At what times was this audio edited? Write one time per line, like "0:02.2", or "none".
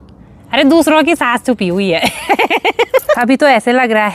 0:03.2